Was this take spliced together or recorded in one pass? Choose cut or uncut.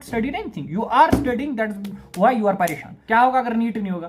cut